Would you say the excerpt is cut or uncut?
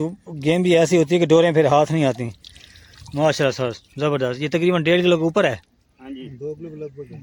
uncut